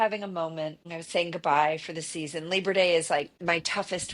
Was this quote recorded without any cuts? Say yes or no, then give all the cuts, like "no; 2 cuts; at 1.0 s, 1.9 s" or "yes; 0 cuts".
no; 2 cuts; at 0.9 s, 3.4 s